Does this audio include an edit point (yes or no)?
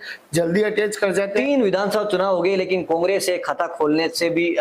yes